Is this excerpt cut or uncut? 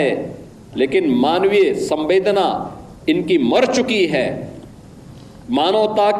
uncut